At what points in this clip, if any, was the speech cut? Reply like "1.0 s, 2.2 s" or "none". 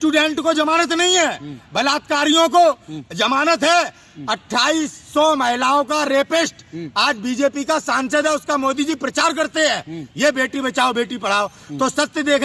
none